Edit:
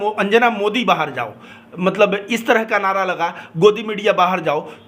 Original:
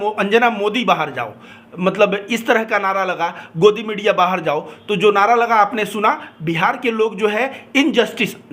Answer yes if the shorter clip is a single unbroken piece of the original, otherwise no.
yes